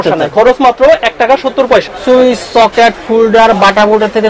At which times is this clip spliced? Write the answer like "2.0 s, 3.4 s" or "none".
1.8 s